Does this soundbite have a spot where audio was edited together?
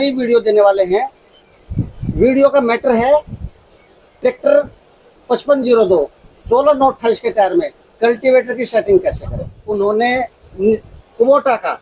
yes; 1 cut; at 9.6 s

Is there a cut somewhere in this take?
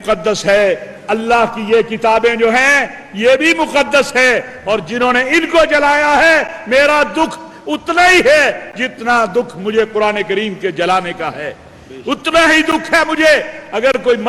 no; 0 cuts

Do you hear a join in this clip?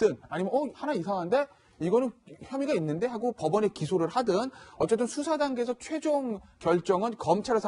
yes; 1 cut; at 6.5 s

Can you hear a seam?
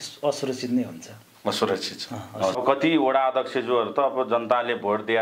yes; 1 cut; at 2.6 s

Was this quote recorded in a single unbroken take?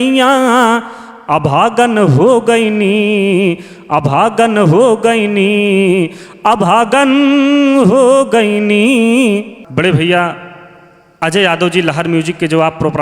no; 1 cut; at 9.6 s

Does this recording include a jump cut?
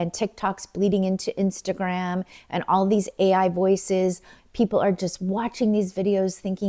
no; 0 cuts

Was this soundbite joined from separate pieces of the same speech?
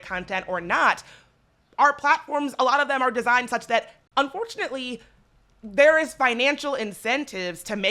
yes; 1 cut; at 3.9 s

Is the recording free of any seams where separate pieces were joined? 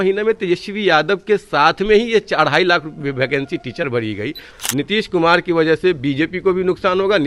no; 1 cut; at 4.5 s

